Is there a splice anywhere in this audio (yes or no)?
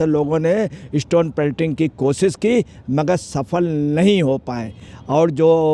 no